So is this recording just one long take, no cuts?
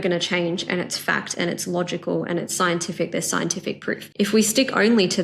no; 1 cut; at 4.1 s

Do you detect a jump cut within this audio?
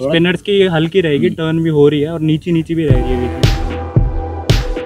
yes; 1 cut; at 3.3 s

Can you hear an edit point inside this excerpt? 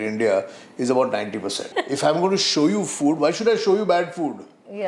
yes; 1 cut; at 1.7 s

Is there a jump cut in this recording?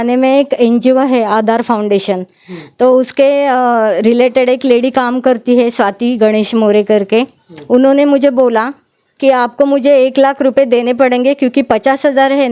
no; 0 cuts

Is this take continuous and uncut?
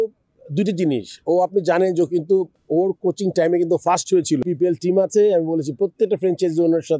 no; 2 cuts; at 2.6 s, 4.4 s

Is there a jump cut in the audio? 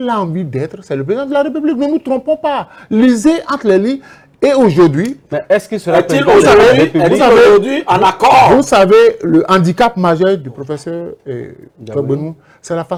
no; 0 cuts

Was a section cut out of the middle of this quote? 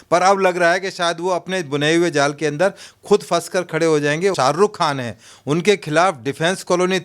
yes; 1 cut; at 4.3 s

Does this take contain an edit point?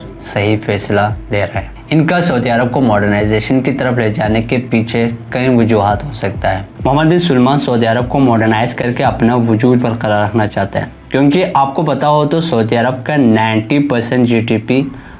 no; 0 cuts

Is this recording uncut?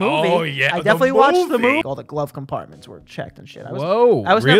no; 1 cut; at 1.8 s

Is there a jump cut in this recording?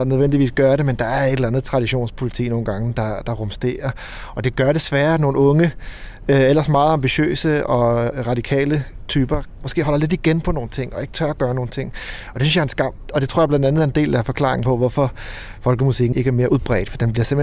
yes; 4 cuts; at 8.1 s, 9.8 s, 13.0 s, 16.2 s

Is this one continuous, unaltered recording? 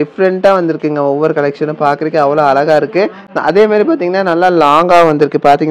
yes; 0 cuts

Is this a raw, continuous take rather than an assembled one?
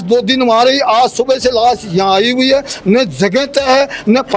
yes; 0 cuts

